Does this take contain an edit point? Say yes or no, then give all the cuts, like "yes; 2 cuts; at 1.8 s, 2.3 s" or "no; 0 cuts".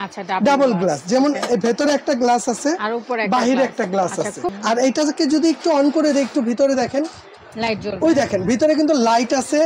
yes; 1 cut; at 4.4 s